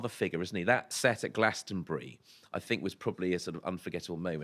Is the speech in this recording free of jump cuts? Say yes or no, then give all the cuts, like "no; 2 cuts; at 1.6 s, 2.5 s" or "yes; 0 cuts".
no; 1 cut; at 0.9 s